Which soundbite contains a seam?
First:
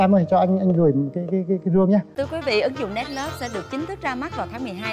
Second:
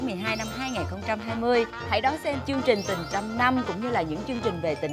first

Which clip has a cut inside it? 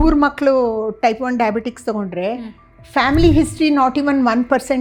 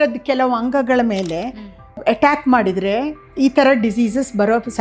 second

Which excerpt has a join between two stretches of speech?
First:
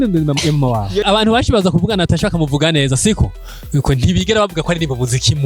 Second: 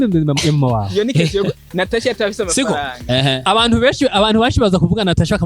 first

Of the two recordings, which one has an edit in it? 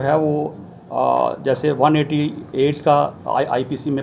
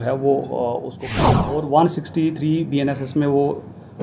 second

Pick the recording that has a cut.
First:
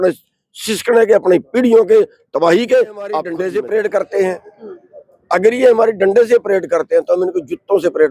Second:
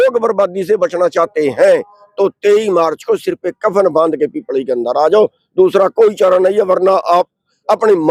first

